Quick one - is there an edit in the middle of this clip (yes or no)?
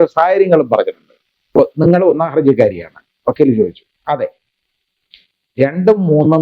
yes